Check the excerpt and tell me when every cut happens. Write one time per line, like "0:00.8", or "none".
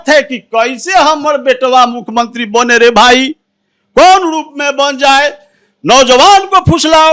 none

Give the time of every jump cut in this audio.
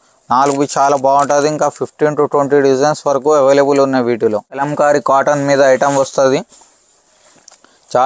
0:04.7

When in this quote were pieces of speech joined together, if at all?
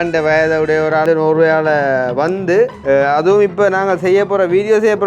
0:01.0
0:02.8

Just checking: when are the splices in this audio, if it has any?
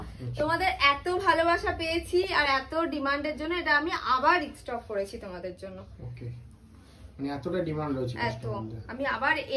none

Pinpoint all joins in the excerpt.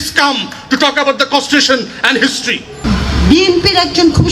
0:02.7

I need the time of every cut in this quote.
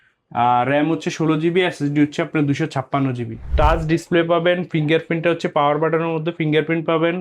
0:03.4

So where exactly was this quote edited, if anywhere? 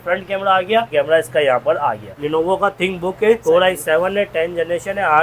0:00.9
0:02.2

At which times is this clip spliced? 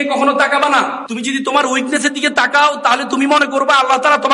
0:01.0

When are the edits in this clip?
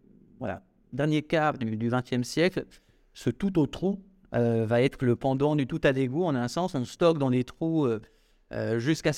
none

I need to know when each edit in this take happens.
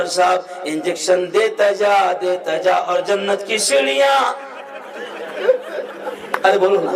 none

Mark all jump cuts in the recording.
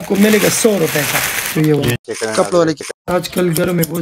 0:01.5

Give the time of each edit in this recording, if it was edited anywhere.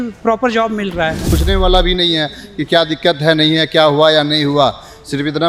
0:01.3

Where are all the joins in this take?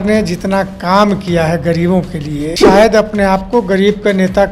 0:02.7

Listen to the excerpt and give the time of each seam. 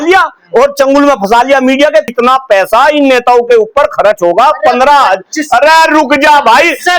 0:02.1

